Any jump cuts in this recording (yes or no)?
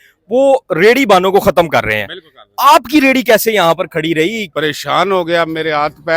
yes